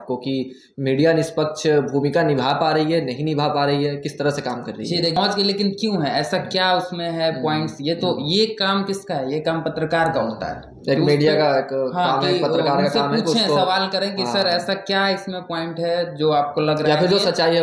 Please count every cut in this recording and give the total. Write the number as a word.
one